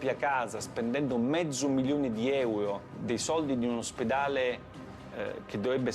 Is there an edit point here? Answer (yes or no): yes